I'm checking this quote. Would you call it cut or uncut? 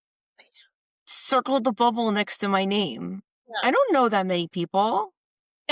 uncut